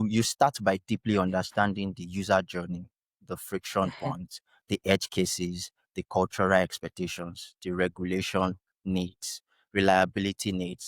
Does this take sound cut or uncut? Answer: uncut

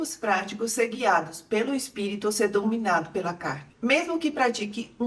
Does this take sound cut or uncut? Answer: cut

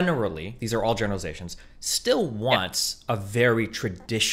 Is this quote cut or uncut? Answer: uncut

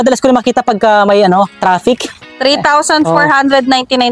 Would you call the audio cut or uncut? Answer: cut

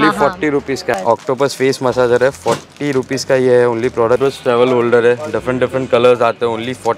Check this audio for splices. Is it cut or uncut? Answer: cut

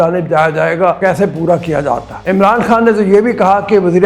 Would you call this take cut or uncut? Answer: cut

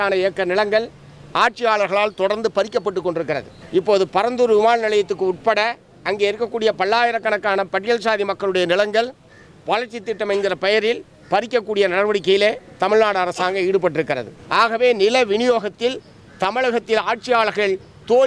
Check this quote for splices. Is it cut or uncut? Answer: cut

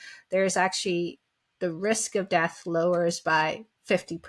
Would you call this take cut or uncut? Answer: uncut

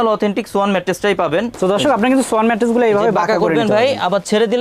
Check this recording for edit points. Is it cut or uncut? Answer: cut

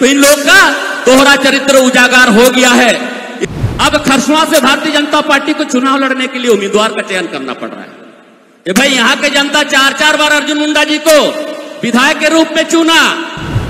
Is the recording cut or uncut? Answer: cut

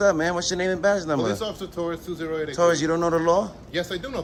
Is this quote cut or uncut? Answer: uncut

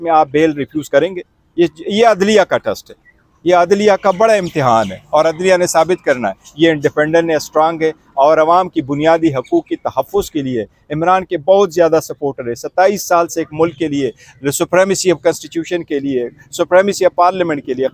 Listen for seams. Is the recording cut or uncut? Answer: uncut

